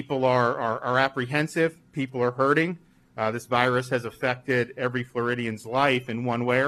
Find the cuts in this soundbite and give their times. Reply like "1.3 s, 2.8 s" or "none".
none